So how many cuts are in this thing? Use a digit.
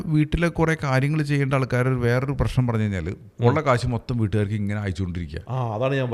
1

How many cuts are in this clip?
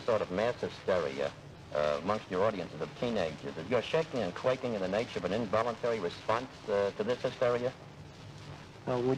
0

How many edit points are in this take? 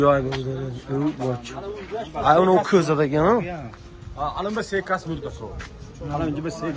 0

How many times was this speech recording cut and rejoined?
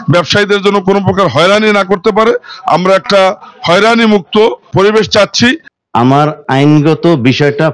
1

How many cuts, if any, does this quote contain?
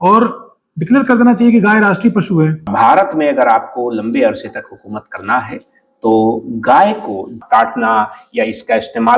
2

